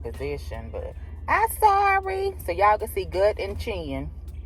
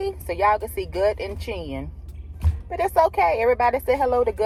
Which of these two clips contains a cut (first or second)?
first